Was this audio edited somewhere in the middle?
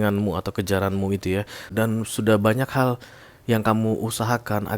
yes; 1 cut; at 1.6 s

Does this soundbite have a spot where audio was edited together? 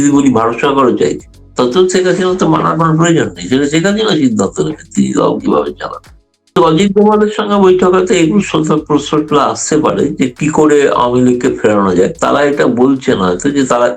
yes; 1 cut; at 6.6 s

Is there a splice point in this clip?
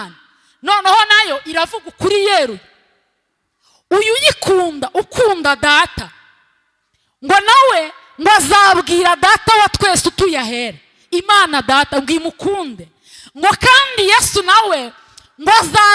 no; 0 cuts

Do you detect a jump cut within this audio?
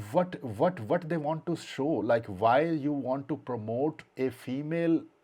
no; 0 cuts

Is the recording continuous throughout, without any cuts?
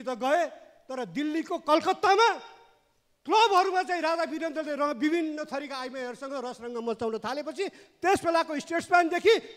yes; 0 cuts

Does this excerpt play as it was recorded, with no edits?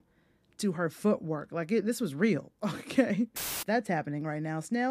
no; 1 cut; at 3.5 s

